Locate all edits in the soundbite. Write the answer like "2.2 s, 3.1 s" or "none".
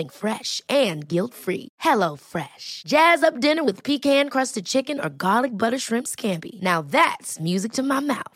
none

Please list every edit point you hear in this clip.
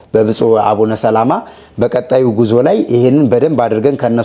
none

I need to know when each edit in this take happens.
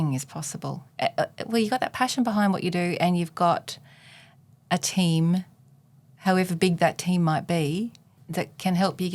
none

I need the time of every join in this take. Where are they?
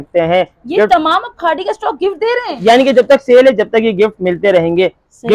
2.6 s

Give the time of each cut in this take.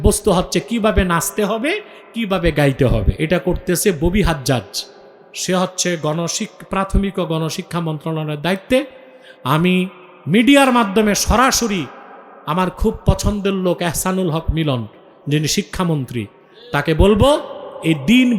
3.1 s

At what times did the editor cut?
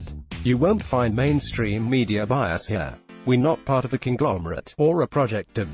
none

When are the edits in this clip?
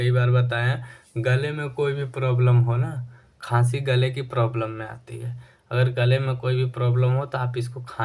none

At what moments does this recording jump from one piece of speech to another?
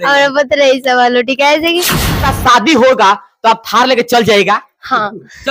2.3 s

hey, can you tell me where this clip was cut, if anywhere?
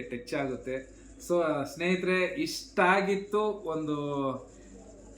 none

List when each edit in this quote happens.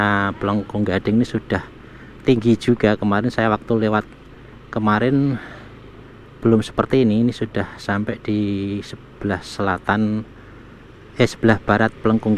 none

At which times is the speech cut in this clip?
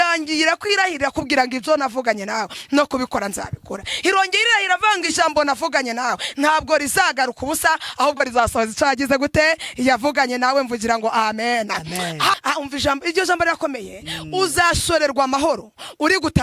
12.4 s

